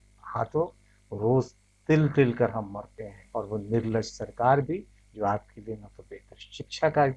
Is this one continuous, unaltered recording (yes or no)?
no